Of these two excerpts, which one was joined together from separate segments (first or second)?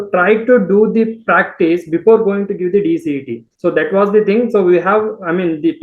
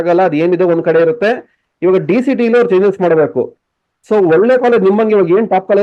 first